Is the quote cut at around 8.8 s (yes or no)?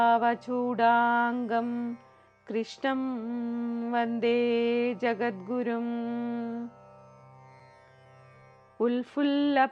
yes